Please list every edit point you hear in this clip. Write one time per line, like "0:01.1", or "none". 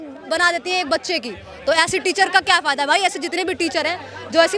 none